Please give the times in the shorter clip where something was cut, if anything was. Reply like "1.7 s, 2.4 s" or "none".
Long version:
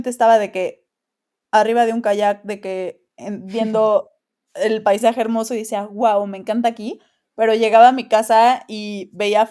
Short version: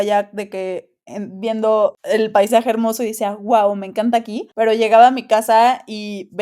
2.0 s, 4.4 s